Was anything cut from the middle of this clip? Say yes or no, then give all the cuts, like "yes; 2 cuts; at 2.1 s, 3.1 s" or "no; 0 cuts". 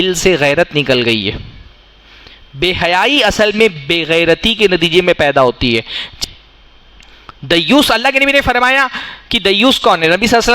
yes; 1 cut; at 6.1 s